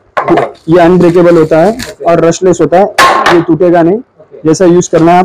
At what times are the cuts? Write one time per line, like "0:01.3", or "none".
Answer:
none